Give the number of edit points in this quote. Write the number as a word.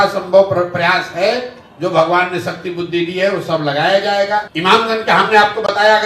one